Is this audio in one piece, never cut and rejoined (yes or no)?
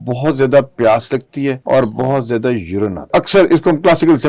no